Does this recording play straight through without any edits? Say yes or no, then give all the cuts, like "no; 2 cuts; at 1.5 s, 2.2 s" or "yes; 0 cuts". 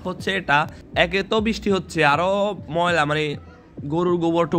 no; 1 cut; at 1.1 s